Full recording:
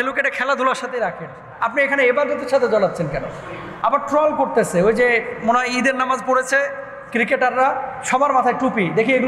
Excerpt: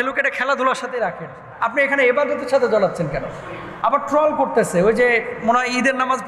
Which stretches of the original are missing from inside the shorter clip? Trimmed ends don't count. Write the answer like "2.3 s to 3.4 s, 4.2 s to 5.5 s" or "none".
none